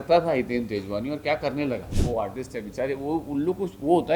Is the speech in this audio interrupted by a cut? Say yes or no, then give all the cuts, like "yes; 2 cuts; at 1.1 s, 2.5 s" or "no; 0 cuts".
yes; 1 cut; at 1.9 s